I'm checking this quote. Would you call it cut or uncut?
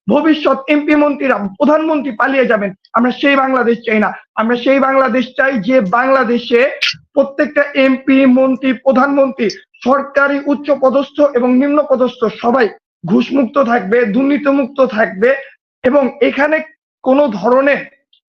uncut